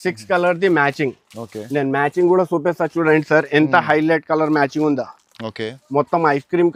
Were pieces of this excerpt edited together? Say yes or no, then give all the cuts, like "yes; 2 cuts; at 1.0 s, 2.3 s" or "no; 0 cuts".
no; 0 cuts